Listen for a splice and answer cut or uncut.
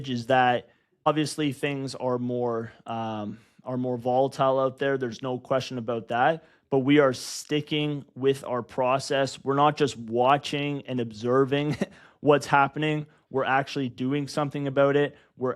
cut